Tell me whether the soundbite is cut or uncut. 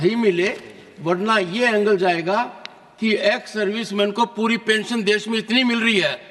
uncut